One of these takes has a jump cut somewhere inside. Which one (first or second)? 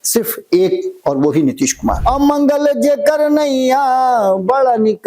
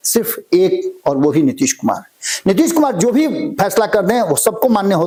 first